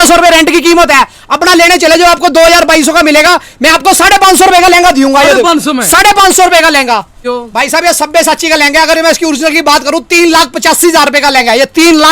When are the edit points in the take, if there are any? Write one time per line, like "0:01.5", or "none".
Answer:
0:07.4